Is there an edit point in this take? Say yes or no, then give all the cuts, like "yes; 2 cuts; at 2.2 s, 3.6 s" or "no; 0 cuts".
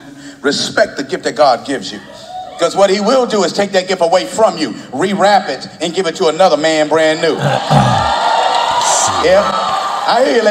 no; 0 cuts